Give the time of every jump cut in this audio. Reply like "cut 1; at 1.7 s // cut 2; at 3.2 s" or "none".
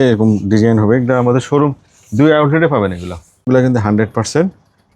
cut 1; at 3.4 s